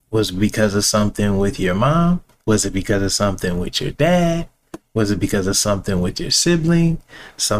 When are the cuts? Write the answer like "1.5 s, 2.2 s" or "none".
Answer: 2.3 s